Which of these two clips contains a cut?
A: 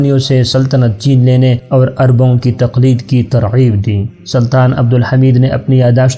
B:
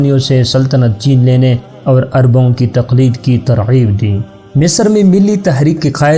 A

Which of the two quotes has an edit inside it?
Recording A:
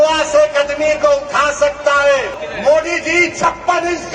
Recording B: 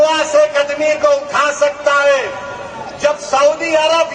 A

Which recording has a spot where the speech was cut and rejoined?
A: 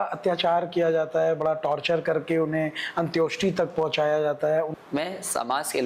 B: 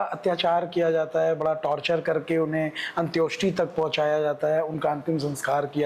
A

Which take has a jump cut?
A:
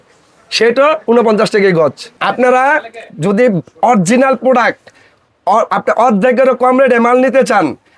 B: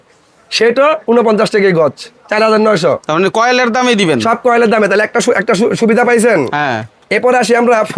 A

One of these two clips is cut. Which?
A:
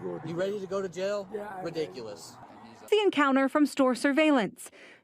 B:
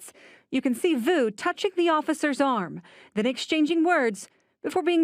A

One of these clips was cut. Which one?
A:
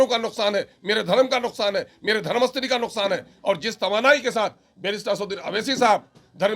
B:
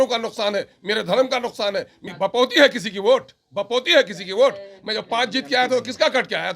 B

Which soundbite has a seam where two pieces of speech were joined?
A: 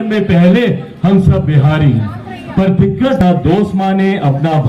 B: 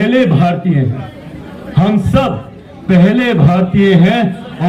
A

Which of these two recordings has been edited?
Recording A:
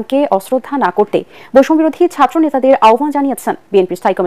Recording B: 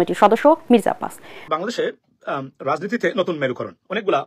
B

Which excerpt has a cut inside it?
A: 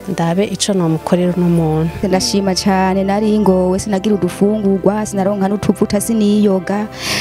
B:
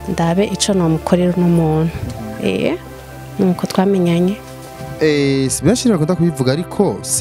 A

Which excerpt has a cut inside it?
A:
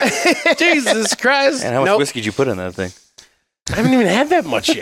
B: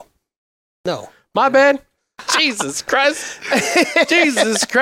B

